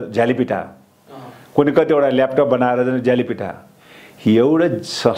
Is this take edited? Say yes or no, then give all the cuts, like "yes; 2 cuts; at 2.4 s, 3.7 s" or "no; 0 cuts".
no; 0 cuts